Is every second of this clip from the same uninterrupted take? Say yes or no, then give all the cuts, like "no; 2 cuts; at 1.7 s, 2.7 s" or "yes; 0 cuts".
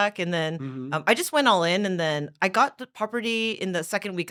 yes; 0 cuts